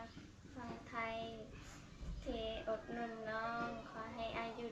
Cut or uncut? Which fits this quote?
uncut